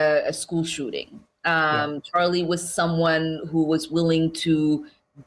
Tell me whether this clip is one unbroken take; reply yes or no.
no